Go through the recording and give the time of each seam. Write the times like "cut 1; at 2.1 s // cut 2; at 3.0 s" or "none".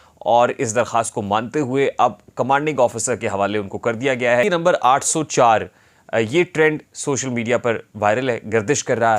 cut 1; at 4.4 s